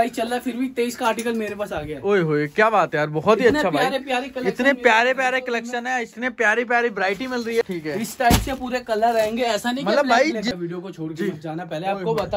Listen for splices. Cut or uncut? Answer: cut